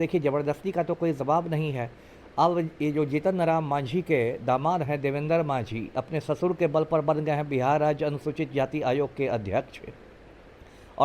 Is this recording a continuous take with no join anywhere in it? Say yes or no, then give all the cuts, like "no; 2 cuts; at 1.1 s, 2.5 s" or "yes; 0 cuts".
yes; 0 cuts